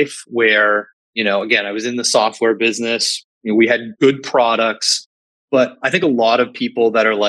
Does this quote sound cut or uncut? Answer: cut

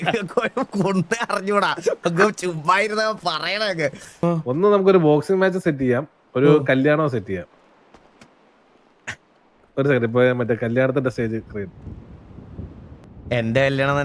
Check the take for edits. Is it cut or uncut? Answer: cut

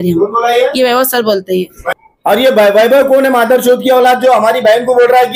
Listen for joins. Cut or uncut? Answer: cut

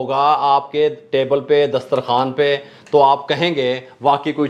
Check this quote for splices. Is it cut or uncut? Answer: uncut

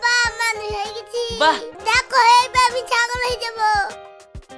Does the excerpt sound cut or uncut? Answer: cut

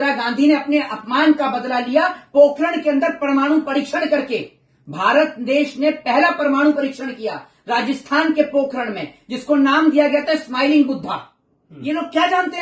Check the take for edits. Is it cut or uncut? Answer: uncut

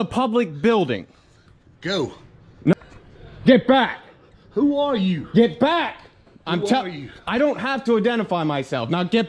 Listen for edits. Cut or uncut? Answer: cut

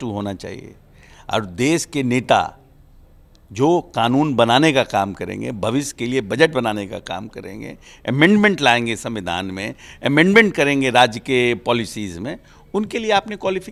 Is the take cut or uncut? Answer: uncut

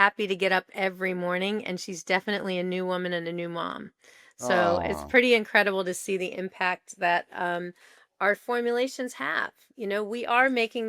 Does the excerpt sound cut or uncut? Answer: uncut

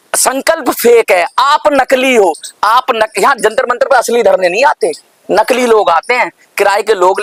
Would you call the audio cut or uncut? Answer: uncut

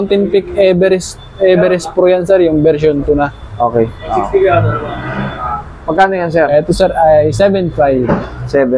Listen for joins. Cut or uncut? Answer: uncut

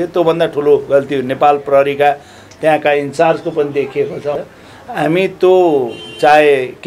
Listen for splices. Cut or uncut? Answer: cut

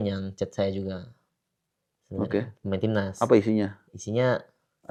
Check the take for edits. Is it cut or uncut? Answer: uncut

